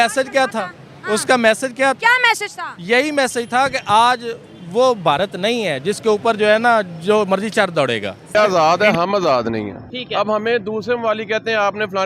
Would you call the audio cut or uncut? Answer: cut